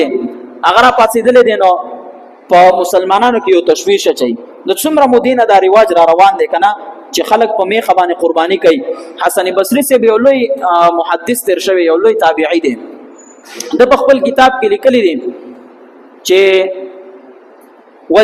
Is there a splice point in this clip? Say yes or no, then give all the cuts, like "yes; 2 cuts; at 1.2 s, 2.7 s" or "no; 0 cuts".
no; 0 cuts